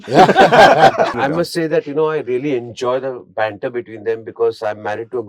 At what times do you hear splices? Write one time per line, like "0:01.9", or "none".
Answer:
0:01.2